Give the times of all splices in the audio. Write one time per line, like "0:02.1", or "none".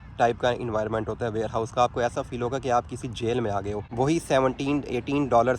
0:03.8